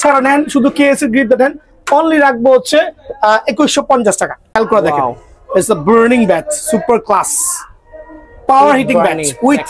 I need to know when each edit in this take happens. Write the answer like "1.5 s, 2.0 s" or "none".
4.4 s